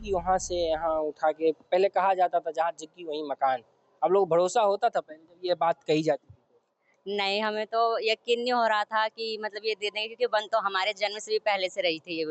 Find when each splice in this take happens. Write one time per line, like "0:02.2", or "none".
none